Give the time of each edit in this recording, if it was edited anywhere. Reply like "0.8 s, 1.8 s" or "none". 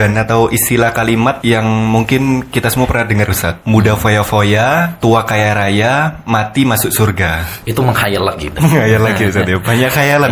1.4 s, 3.5 s, 5.0 s, 7.6 s